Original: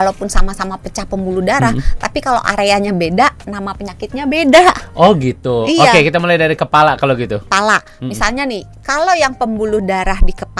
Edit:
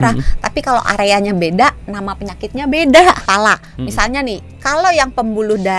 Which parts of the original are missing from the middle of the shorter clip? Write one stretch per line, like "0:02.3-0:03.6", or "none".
0:04.8-0:07.5